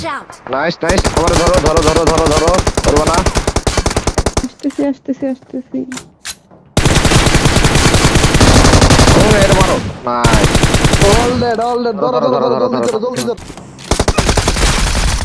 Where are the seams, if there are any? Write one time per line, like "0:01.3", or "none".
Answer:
0:13.3